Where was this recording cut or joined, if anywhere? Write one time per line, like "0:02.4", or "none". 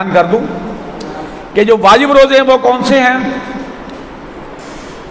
none